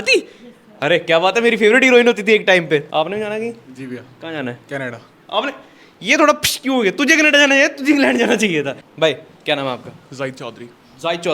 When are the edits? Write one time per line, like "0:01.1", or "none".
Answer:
0:02.9
0:08.8